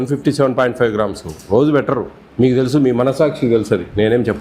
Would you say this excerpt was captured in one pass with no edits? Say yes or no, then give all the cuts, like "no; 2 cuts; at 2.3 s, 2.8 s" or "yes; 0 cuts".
no; 1 cut; at 2.2 s